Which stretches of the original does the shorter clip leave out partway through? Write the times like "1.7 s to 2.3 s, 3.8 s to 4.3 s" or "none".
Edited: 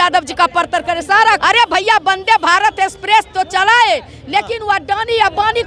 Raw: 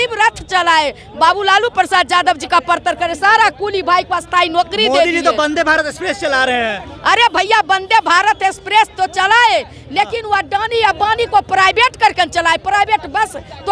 3.5 s to 7.0 s